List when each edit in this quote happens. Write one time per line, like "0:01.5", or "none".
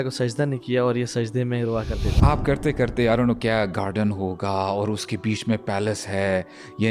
0:02.1